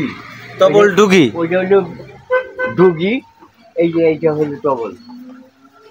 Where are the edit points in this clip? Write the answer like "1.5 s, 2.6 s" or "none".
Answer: none